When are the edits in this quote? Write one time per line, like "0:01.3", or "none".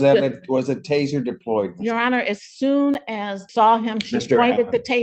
0:03.4